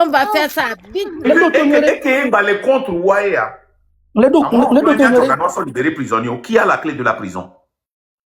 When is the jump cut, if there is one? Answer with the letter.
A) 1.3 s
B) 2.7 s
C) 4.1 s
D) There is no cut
A